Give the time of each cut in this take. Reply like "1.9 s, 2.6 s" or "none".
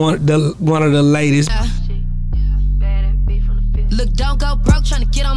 none